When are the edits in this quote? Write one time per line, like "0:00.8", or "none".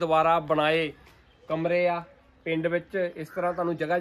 none